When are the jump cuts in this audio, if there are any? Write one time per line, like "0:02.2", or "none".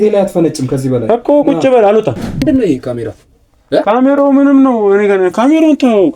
0:02.4